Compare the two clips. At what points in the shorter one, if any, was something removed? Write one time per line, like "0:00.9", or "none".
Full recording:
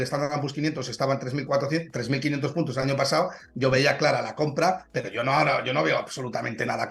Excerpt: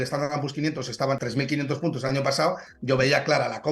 0:01.2

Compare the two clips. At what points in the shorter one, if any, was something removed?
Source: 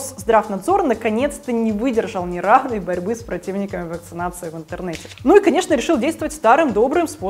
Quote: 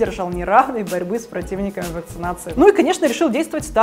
0:02.4

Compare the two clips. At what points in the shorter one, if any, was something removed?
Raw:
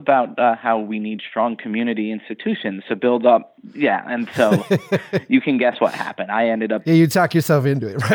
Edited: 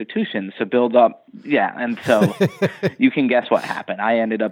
none

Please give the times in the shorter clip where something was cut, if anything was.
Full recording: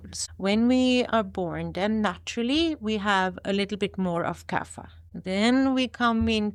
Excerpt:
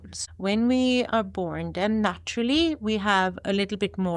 none

